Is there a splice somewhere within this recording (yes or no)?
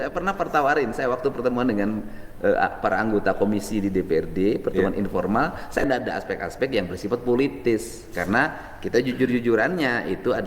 yes